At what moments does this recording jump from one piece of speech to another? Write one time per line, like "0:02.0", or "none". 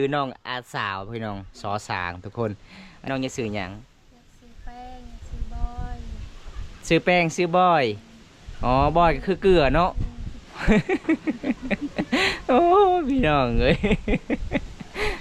0:03.1

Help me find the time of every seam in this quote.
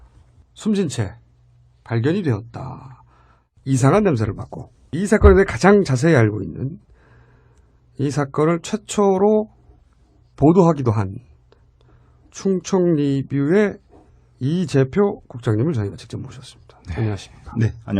0:04.1

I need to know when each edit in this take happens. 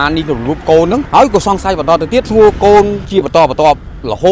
0:01.1
0:02.3
0:03.0

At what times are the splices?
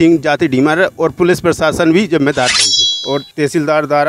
0:02.6

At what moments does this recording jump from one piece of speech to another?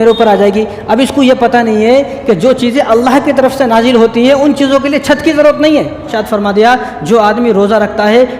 0:06.1

